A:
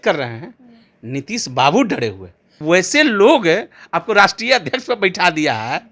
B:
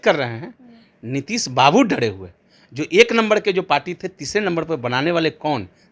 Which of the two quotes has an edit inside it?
A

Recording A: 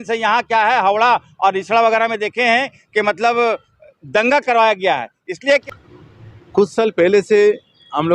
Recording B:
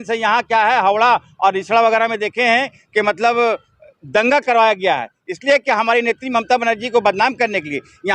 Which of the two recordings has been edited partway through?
A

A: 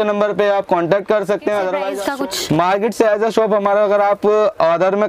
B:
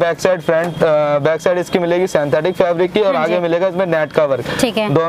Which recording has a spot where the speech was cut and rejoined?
A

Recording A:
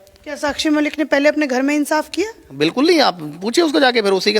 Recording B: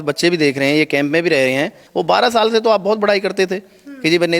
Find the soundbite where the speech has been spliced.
B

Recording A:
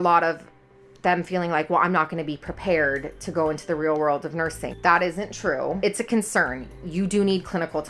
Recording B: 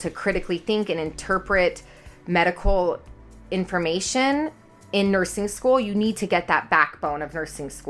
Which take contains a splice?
A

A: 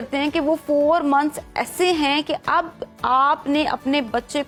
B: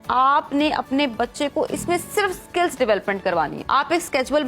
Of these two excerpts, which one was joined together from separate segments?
B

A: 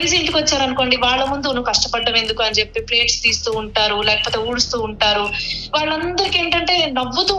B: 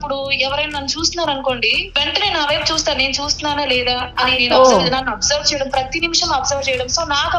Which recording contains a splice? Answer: B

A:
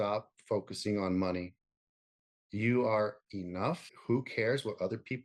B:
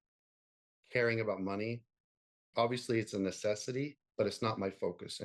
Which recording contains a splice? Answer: A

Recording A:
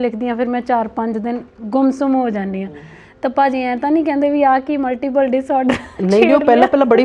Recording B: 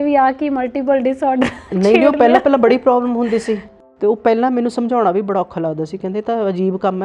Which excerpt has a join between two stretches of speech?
B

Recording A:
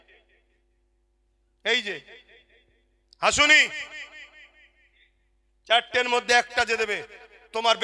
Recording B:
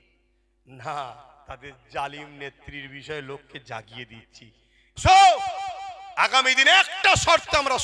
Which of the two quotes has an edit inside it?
B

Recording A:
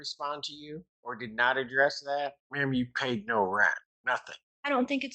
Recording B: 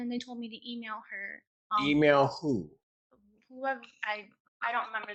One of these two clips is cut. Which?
A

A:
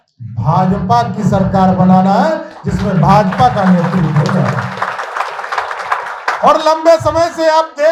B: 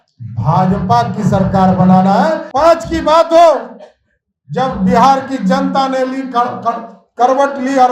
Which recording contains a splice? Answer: B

